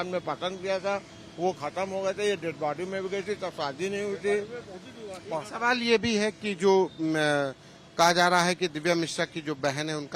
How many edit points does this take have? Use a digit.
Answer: 0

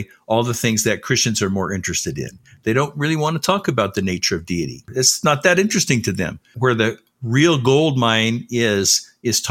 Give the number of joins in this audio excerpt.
2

